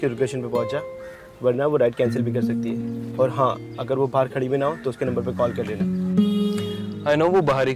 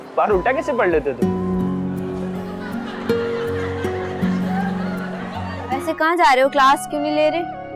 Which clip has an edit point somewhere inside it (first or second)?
second